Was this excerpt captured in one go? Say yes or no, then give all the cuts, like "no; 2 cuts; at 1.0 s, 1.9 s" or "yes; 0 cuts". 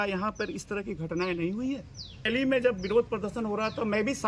no; 1 cut; at 2.3 s